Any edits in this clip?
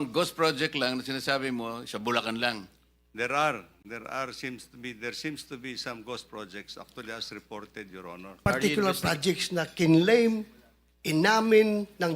yes; 1 cut; at 8.5 s

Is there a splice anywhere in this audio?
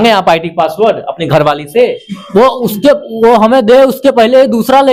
no; 0 cuts

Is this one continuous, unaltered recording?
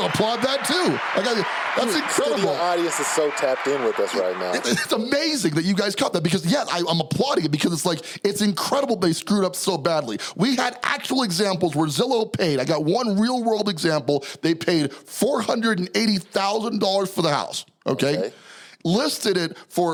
yes; 0 cuts

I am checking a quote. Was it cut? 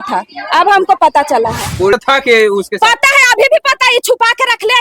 yes; 1 cut; at 1.9 s

